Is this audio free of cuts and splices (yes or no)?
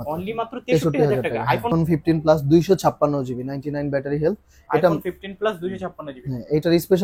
no